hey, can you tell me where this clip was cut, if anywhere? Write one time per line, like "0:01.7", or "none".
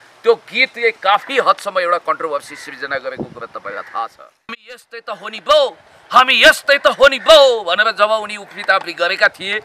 0:04.8